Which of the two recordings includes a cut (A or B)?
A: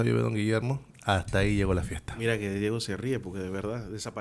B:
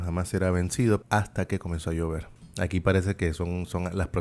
B